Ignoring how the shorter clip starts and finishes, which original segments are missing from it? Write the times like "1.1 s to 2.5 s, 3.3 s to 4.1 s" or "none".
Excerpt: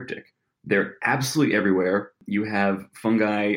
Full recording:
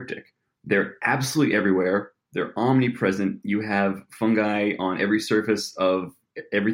2.2 s to 3.4 s

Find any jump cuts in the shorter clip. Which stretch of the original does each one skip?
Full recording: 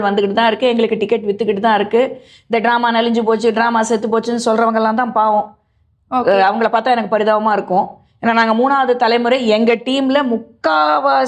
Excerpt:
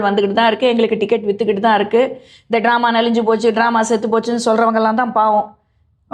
none

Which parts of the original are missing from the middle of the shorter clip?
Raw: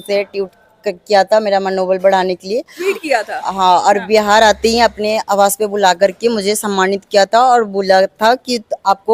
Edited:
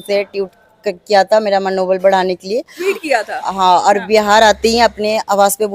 none

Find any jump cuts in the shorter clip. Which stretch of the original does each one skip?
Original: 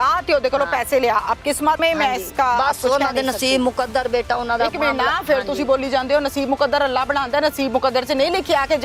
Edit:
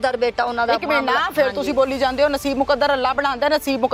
none

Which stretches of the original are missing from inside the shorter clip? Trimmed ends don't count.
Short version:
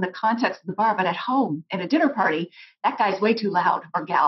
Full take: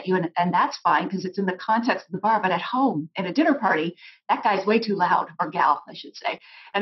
none

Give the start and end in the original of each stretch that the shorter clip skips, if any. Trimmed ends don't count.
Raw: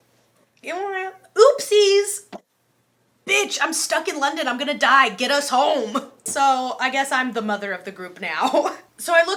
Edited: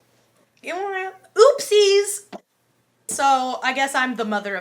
3.0 s to 6.2 s

